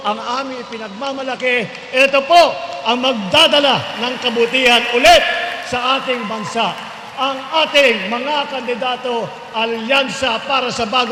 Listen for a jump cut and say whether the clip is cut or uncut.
uncut